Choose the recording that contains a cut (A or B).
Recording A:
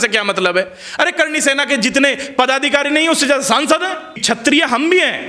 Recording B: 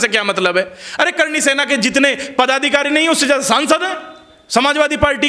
A